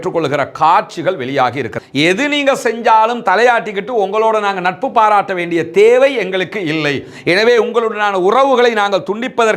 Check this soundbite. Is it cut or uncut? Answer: cut